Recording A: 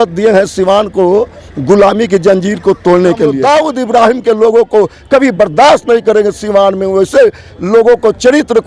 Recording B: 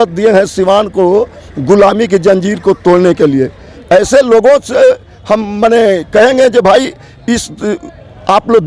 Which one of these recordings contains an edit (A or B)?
A